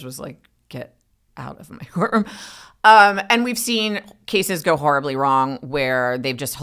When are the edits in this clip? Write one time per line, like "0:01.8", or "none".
none